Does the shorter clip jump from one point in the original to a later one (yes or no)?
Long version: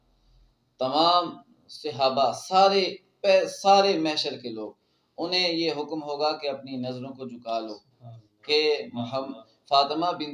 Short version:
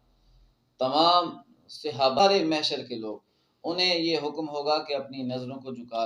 yes